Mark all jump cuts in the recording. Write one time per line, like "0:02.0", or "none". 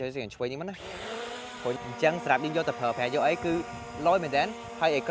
0:01.8